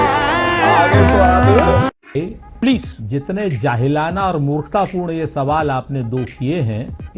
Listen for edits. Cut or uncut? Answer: cut